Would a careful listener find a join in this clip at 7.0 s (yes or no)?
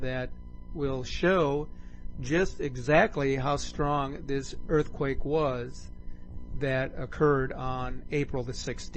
yes